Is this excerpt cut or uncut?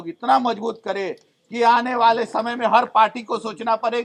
uncut